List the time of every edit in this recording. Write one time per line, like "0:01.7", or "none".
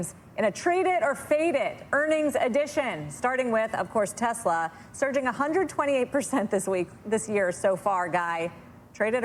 none